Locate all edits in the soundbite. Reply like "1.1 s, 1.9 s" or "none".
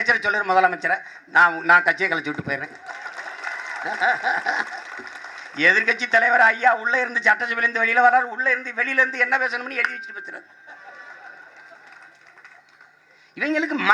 none